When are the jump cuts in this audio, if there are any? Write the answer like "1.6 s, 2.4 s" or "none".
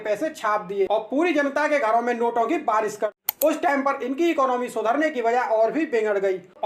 3.1 s